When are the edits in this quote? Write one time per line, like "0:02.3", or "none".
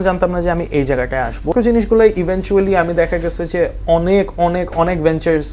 0:01.5